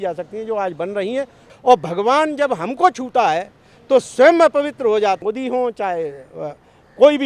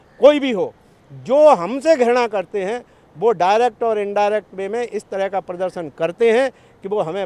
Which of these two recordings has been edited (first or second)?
first